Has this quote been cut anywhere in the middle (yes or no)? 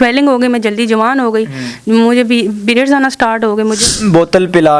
yes